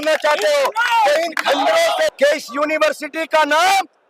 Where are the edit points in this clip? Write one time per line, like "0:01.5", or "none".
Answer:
0:02.1

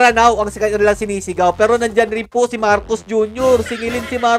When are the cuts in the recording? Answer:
none

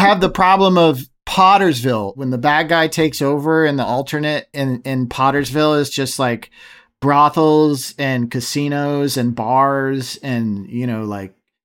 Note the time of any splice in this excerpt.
0:01.1

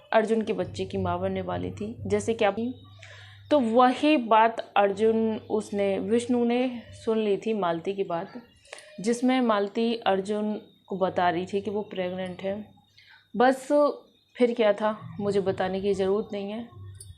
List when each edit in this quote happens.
0:02.6

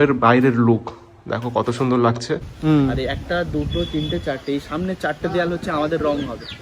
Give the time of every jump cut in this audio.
0:02.5

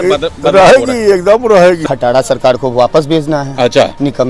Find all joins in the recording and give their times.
0:01.9

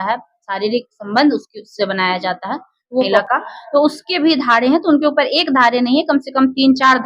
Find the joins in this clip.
0:03.2

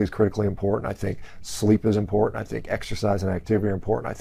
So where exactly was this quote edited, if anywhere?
none

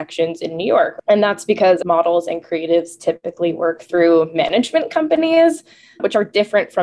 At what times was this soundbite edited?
0:01.0
0:01.8

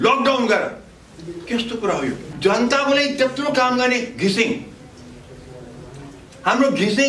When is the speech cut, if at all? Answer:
0:02.3

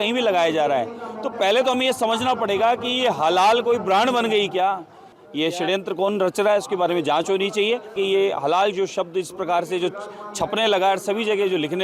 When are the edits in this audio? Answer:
0:05.2
0:07.9

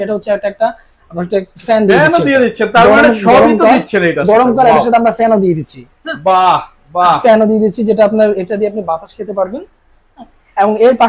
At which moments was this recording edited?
none

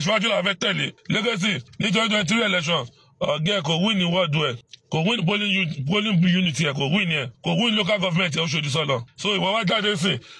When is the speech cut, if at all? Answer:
0:00.9
0:01.7
0:04.7
0:07.3
0:09.1

